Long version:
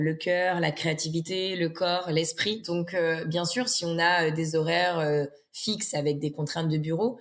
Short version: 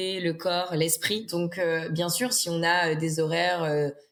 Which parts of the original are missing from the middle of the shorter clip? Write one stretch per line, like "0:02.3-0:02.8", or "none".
none

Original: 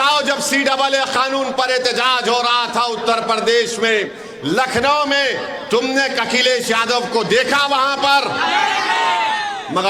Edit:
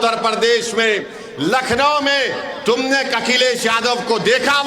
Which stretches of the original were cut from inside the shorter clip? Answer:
none

